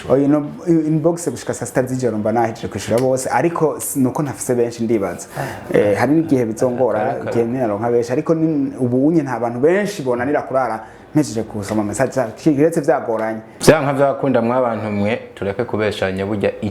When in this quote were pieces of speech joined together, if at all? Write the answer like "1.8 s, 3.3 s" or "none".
13.5 s